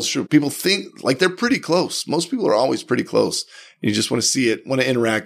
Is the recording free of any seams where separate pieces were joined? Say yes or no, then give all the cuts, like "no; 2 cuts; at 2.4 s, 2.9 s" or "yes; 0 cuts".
yes; 0 cuts